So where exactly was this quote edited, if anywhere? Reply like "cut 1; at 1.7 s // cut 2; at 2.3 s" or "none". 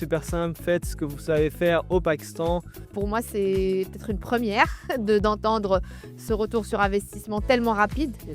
cut 1; at 2.9 s